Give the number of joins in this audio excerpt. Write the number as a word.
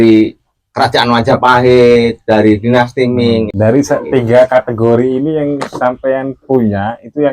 one